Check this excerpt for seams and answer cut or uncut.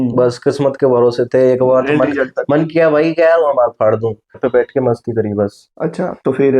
cut